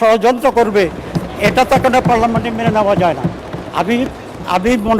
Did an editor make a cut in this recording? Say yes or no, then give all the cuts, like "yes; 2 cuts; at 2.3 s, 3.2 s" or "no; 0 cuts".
no; 0 cuts